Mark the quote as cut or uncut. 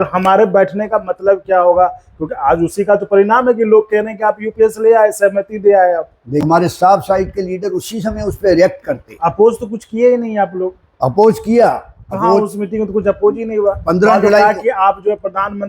cut